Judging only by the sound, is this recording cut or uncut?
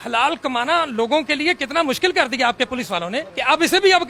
uncut